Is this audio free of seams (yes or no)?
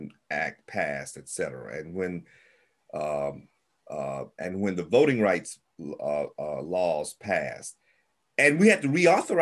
yes